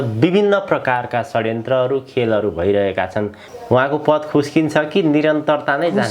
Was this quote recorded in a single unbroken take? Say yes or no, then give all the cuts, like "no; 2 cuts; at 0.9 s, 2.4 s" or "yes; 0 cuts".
no; 1 cut; at 3.4 s